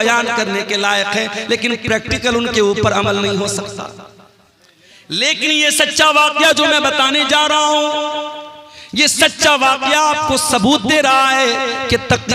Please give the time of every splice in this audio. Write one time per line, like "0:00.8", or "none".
none